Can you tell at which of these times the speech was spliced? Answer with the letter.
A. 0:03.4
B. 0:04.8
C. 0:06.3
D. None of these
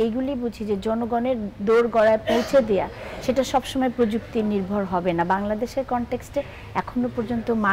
D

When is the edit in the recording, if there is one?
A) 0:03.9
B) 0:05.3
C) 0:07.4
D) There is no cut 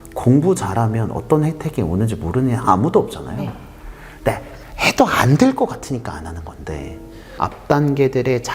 C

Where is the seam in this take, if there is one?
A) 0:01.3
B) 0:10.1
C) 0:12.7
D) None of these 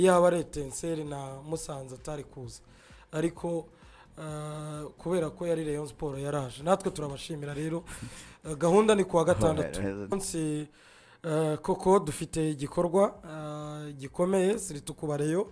B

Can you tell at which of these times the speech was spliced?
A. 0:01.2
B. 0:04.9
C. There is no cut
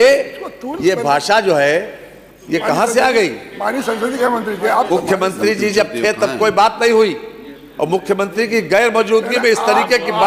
B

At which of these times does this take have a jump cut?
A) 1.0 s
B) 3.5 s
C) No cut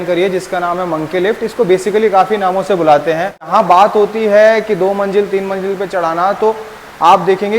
B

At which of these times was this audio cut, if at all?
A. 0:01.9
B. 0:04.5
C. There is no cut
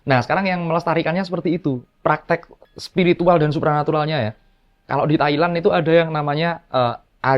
C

